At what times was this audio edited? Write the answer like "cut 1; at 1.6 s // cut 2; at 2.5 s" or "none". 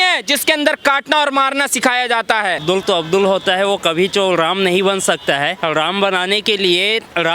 cut 1; at 2.6 s // cut 2; at 5.6 s